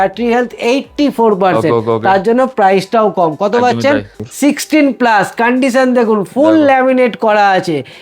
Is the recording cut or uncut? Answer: cut